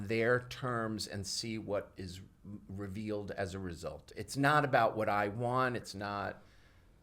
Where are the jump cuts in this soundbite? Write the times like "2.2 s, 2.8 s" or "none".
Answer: 4.1 s, 5.9 s